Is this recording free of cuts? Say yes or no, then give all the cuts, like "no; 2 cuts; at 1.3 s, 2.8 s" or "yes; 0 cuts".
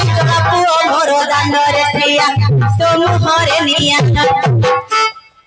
yes; 0 cuts